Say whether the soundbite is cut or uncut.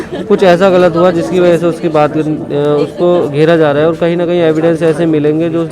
uncut